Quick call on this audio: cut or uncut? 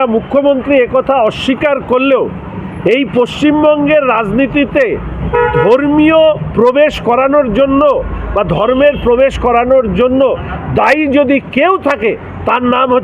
uncut